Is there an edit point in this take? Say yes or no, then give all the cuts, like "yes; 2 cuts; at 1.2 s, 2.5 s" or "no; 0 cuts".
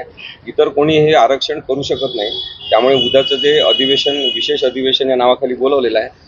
no; 0 cuts